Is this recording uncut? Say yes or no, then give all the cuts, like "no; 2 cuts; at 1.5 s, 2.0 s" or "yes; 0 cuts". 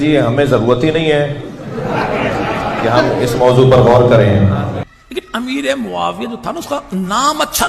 no; 1 cut; at 4.8 s